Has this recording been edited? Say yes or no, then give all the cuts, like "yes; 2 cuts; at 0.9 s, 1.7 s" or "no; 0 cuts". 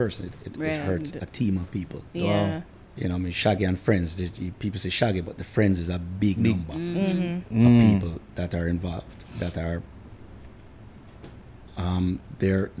no; 0 cuts